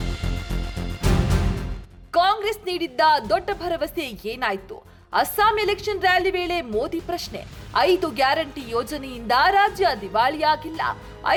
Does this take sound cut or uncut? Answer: uncut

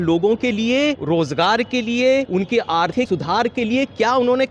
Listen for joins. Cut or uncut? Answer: cut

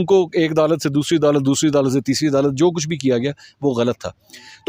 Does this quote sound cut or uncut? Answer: uncut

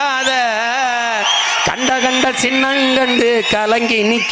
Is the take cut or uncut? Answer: uncut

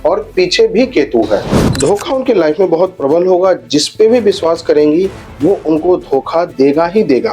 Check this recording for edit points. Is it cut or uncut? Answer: cut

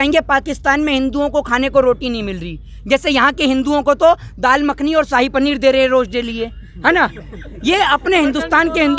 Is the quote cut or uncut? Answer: uncut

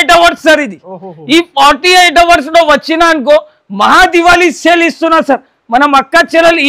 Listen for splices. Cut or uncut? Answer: uncut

